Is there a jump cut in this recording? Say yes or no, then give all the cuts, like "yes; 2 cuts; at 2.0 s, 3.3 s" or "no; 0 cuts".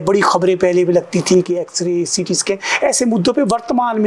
no; 0 cuts